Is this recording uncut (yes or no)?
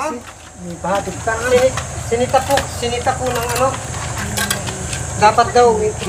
yes